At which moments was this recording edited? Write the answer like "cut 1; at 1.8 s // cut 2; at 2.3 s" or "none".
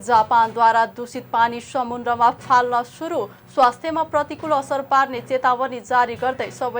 none